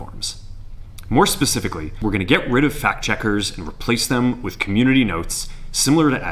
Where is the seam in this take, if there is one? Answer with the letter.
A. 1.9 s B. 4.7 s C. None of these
A